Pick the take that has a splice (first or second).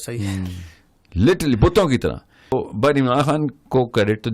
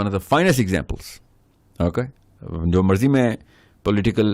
first